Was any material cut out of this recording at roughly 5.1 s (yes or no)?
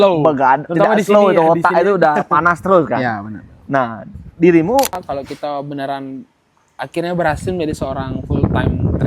yes